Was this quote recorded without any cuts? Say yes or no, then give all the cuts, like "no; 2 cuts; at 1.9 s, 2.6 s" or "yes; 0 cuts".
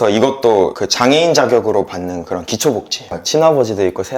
no; 1 cut; at 3.0 s